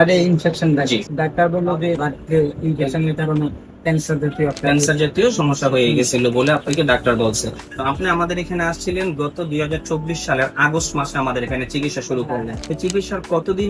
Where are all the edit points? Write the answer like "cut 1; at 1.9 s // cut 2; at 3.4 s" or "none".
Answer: cut 1; at 1.1 s // cut 2; at 2.0 s // cut 3; at 7.7 s // cut 4; at 12.6 s